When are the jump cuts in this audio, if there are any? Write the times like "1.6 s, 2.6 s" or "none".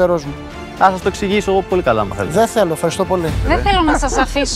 3.4 s